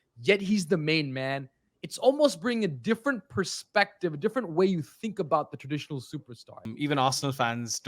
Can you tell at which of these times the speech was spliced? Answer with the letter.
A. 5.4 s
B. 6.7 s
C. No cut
B